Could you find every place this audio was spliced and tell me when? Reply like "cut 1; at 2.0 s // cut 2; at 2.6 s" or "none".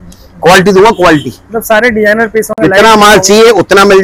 none